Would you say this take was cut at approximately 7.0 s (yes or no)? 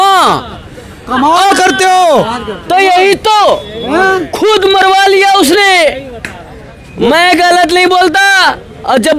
no